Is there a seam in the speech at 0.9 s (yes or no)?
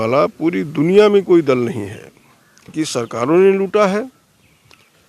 no